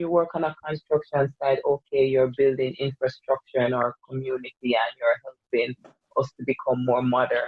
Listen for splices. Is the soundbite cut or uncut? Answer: uncut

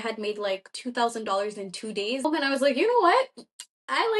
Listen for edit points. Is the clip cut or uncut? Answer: cut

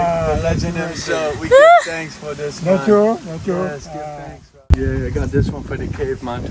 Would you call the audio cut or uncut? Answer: cut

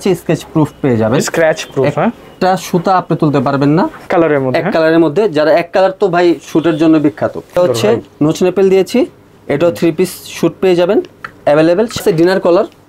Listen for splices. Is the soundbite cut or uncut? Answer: cut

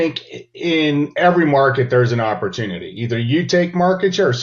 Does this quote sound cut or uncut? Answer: uncut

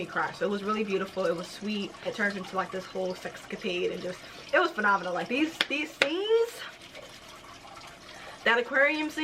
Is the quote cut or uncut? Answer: cut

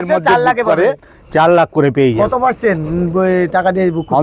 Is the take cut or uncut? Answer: uncut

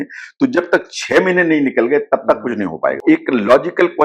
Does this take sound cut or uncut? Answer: cut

